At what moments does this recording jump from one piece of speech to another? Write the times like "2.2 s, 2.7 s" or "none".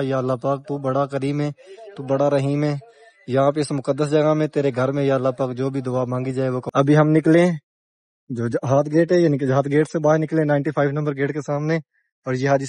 6.2 s